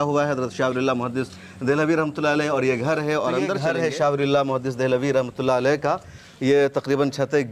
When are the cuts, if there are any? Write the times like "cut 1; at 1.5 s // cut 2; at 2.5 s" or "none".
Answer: cut 1; at 3.6 s